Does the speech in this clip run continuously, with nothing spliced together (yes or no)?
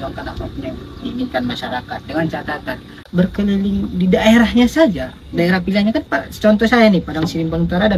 no